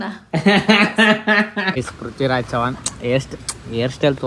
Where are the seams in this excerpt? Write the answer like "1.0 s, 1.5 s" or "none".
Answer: 1.8 s

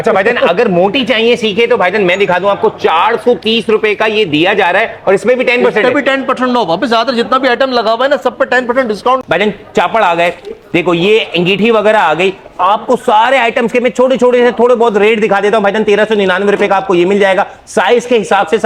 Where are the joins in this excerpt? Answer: none

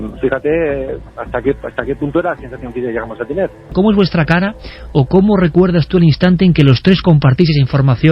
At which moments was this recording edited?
3.7 s

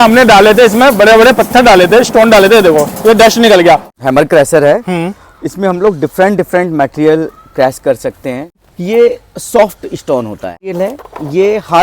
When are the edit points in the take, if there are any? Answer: 3.9 s, 8.5 s, 10.7 s

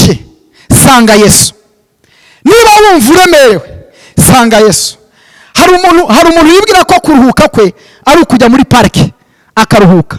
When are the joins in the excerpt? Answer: none

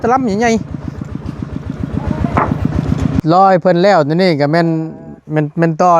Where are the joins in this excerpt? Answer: 3.2 s

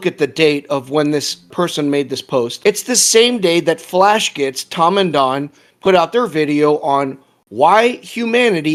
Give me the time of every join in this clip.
none

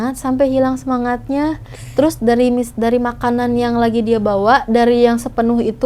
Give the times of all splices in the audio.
none

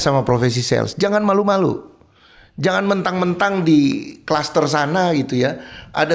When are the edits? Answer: none

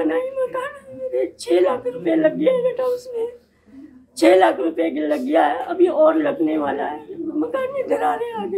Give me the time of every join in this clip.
none

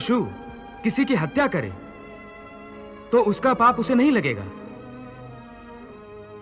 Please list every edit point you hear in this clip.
none

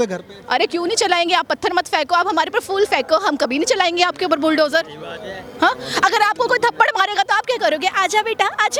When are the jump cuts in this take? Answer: none

